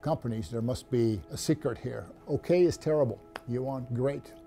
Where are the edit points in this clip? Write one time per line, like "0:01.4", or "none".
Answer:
0:02.1
0:03.3